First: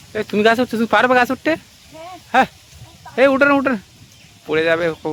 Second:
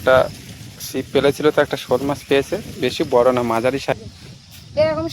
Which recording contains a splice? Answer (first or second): second